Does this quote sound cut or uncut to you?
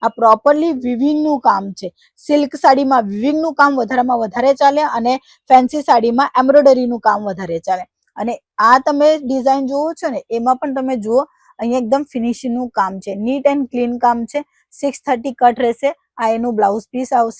uncut